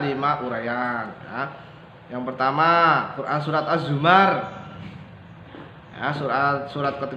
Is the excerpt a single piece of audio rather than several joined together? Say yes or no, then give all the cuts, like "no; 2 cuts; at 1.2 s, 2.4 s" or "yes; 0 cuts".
yes; 0 cuts